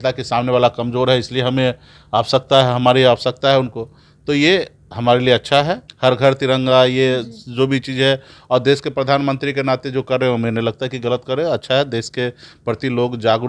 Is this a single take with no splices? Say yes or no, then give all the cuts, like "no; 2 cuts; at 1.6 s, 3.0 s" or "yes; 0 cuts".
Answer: no; 1 cut; at 5.8 s